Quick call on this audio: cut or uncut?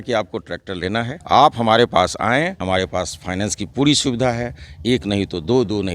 cut